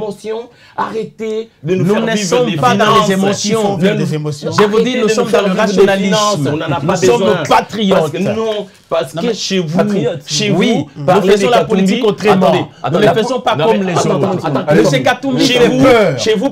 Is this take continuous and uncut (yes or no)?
yes